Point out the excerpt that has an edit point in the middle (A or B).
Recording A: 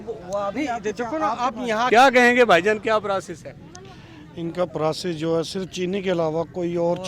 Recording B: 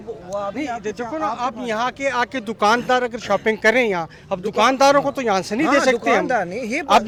A